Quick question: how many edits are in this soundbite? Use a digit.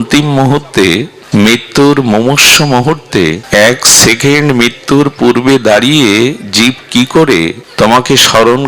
3